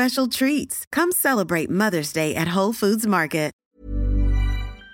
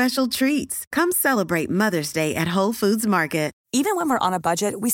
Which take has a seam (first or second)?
first